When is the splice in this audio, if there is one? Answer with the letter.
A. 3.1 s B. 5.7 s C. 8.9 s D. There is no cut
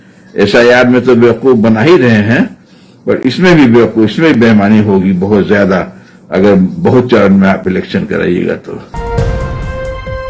C